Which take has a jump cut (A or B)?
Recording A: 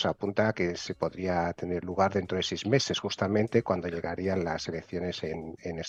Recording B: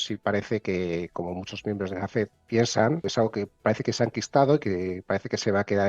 B